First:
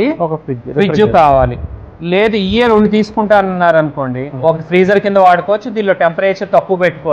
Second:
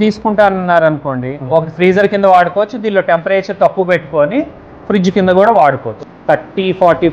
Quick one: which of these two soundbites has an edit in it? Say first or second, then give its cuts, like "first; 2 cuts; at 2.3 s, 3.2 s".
second; 1 cut; at 6.0 s